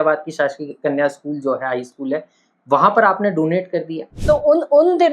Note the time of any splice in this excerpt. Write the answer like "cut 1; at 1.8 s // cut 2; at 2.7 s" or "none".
cut 1; at 4.0 s

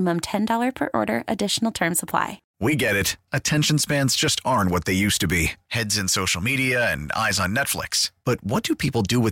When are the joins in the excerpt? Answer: cut 1; at 2.4 s

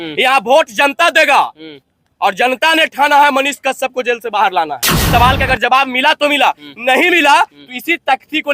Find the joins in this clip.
cut 1; at 4.9 s

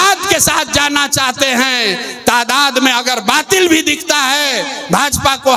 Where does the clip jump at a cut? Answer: none

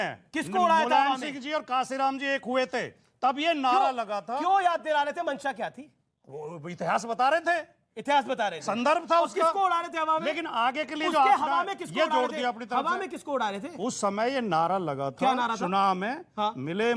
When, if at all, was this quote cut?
none

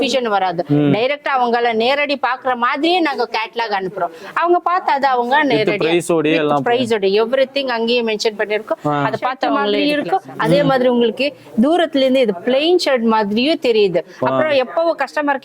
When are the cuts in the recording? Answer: cut 1; at 9.8 s

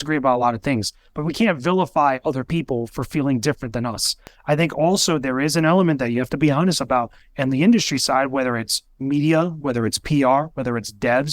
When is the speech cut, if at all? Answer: cut 1; at 4.3 s

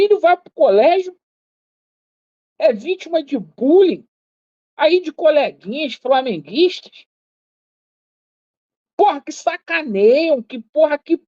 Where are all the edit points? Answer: none

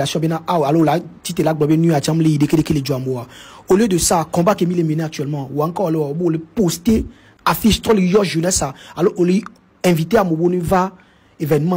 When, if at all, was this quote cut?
none

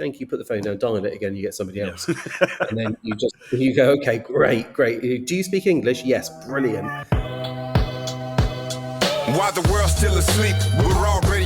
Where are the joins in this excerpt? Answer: cut 1; at 7.2 s

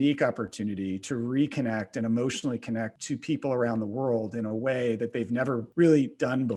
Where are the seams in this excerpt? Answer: cut 1; at 3.0 s // cut 2; at 5.7 s

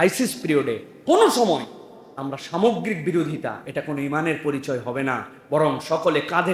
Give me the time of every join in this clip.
none

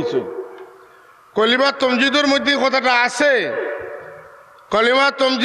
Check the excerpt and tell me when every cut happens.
none

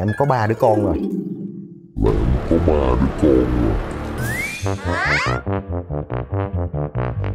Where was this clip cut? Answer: none

